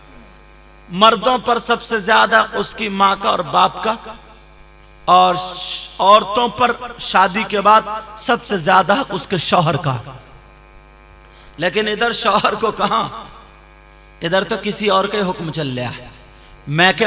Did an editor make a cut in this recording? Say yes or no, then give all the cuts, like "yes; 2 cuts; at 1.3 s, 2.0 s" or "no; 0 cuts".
no; 0 cuts